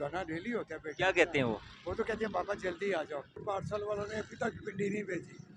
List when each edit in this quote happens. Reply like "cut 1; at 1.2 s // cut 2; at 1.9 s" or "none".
cut 1; at 3.4 s